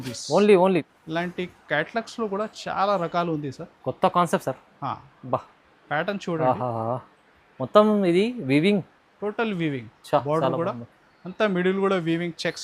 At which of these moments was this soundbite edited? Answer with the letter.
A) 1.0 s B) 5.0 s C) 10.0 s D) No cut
A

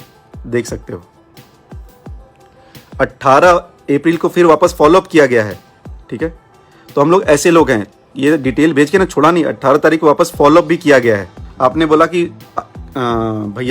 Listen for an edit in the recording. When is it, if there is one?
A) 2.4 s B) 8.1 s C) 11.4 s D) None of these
C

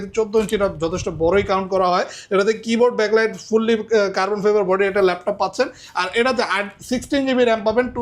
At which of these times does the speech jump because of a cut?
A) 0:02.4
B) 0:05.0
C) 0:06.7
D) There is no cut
D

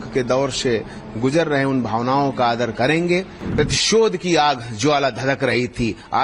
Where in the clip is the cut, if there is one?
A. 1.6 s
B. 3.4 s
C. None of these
B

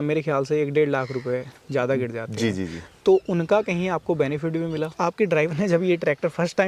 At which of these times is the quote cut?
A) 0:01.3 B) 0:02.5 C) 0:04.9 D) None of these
C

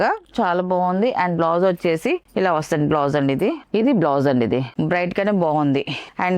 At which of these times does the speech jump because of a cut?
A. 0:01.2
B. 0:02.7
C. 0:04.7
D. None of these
C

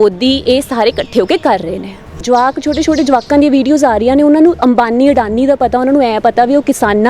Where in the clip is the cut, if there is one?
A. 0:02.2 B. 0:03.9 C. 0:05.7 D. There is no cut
A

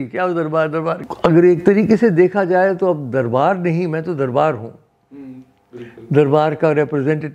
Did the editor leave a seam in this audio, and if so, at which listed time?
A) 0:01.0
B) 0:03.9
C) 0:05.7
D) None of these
A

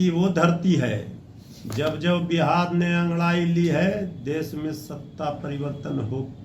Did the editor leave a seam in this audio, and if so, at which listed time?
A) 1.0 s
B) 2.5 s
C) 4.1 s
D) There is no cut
D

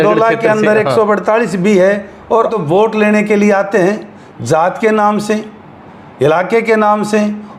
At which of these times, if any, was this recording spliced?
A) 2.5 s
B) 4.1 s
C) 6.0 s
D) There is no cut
A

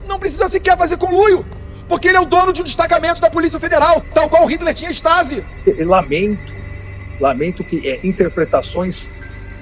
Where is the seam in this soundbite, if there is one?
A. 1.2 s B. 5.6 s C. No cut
B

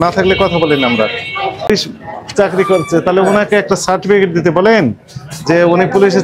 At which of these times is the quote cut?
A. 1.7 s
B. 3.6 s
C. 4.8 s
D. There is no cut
A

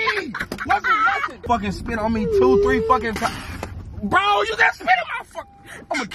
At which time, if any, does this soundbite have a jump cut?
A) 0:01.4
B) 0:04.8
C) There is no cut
A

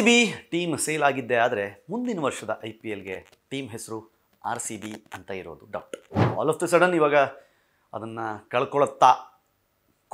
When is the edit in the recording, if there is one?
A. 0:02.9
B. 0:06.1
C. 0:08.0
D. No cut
B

